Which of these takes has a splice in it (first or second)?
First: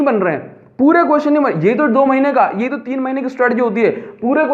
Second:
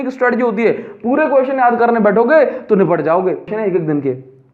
second